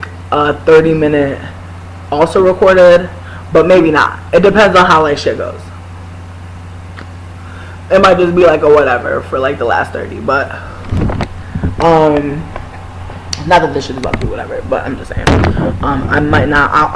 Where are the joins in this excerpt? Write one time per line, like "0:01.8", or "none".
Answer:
0:14.0